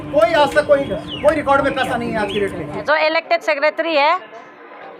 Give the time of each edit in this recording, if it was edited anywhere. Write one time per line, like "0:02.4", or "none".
0:02.8